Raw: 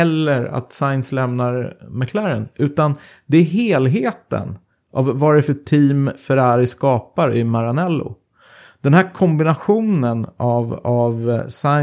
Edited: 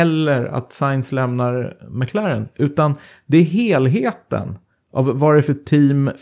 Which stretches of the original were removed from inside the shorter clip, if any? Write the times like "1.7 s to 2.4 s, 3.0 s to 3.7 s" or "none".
none